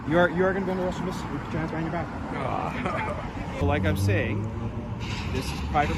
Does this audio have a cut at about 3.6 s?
yes; 1 cut; at 3.6 s

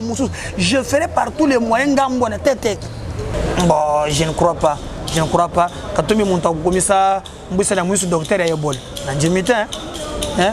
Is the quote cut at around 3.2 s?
yes; 1 cut; at 3.2 s

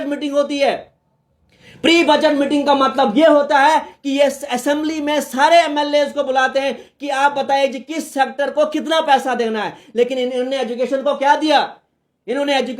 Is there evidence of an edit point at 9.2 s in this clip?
no; 0 cuts

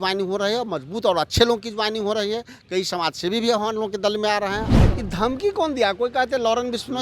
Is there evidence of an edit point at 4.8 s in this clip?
yes; 1 cut; at 4.8 s

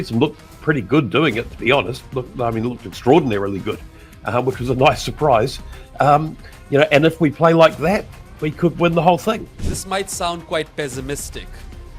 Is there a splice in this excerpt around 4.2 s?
no; 1 cut; at 9.5 s

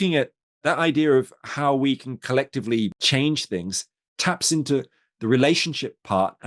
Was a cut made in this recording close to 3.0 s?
yes; 1 cut; at 3.0 s

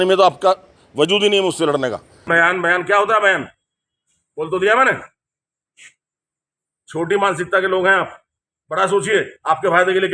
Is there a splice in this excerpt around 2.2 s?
yes; 1 cut; at 2.2 s

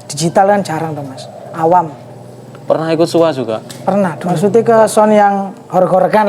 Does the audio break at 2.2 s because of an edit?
no; 1 cut; at 4.2 s

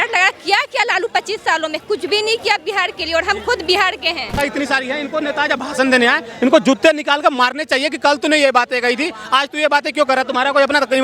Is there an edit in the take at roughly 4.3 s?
yes; 1 cut; at 4.3 s

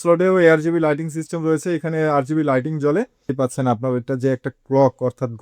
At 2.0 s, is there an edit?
no; 1 cut; at 3.3 s

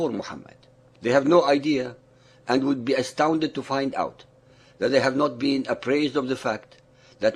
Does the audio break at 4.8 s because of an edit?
yes; 1 cut; at 4.8 s

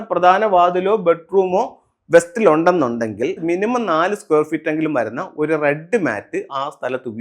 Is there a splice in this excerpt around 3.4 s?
yes; 1 cut; at 3.4 s

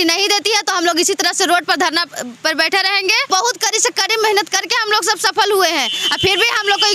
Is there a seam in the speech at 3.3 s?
yes; 1 cut; at 3.3 s

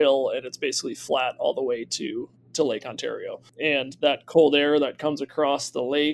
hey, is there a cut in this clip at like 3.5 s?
yes; 1 cut; at 3.5 s

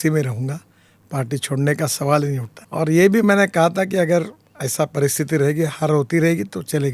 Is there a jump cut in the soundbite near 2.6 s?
yes; 1 cut; at 2.6 s

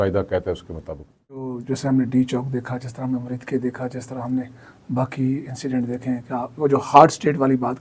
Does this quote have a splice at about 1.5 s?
yes; 1 cut; at 1.5 s

